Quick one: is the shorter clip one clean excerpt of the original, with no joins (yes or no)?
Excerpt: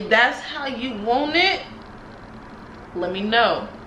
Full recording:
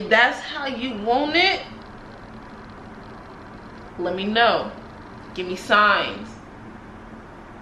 no